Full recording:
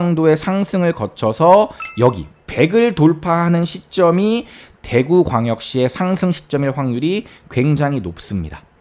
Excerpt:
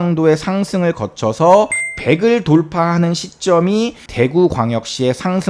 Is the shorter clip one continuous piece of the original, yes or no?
no